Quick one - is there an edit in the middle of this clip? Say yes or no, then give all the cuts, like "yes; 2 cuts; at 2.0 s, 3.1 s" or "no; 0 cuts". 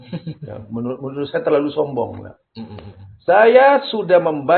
no; 0 cuts